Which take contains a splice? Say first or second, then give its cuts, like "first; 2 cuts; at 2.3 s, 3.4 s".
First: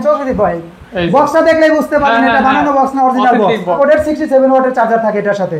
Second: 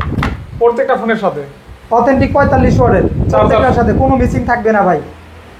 first; 1 cut; at 3.8 s